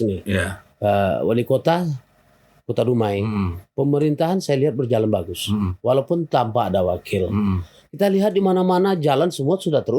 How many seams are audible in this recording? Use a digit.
0